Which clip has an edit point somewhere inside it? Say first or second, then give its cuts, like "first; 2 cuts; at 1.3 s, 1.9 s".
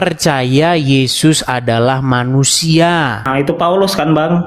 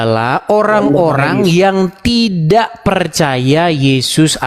first; 1 cut; at 3.3 s